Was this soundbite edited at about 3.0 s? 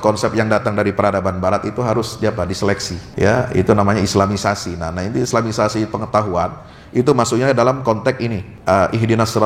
yes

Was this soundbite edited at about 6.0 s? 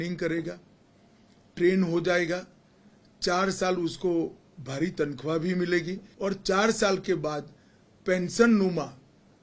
yes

